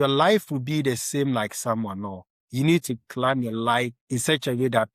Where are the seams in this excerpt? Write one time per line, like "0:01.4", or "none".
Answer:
0:04.0